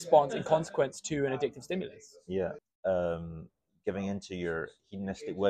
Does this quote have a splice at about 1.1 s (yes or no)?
no